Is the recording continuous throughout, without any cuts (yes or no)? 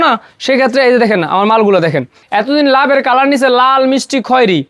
no